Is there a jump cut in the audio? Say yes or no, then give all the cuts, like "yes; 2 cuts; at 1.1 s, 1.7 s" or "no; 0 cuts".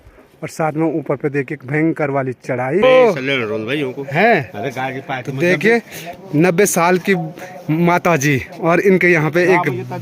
yes; 1 cut; at 2.8 s